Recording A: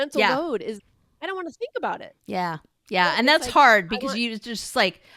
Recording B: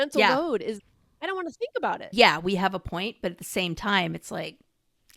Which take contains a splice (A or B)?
B